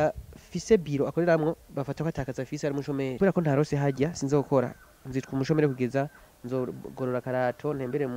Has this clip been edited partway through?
yes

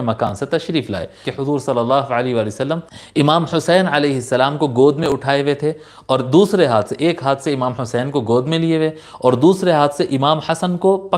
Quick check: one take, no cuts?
no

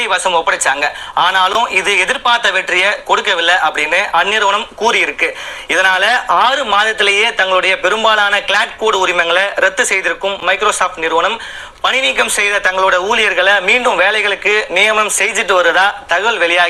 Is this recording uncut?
yes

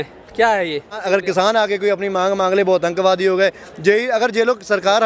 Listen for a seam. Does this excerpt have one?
yes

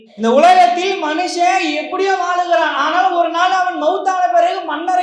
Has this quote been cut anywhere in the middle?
no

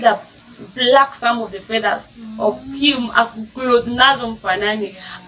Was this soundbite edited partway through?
no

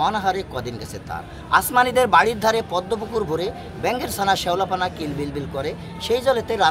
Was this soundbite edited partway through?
no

